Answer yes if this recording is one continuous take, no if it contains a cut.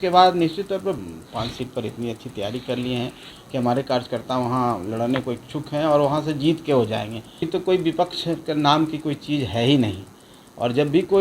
no